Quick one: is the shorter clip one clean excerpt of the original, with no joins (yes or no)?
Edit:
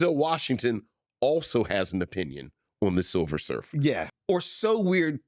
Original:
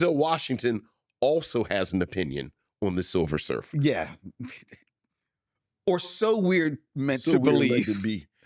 no